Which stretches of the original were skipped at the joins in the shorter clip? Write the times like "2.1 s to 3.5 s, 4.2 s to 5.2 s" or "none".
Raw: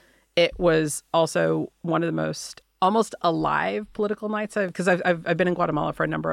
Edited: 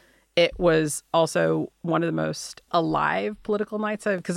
2.6 s to 3.1 s